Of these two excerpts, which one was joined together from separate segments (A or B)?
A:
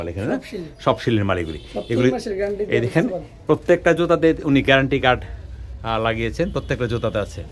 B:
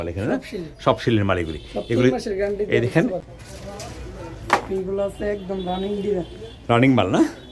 B